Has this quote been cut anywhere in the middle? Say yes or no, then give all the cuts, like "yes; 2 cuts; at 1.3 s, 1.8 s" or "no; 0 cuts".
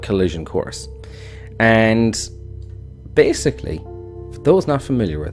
yes; 1 cut; at 4.1 s